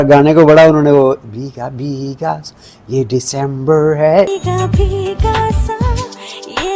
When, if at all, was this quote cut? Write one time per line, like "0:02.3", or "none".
0:04.4